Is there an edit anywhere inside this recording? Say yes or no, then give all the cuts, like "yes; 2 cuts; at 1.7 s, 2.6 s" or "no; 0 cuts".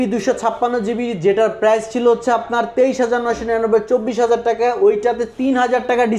no; 0 cuts